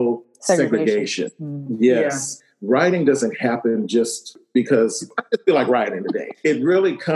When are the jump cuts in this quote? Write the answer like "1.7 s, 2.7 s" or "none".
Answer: 2.3 s